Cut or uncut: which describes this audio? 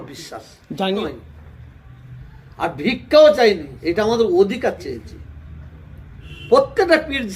cut